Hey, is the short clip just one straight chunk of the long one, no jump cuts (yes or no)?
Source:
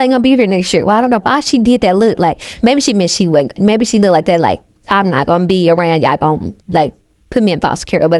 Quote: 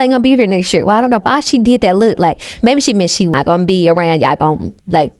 no